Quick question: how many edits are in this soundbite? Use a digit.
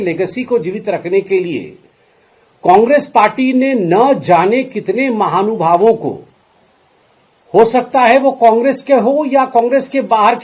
0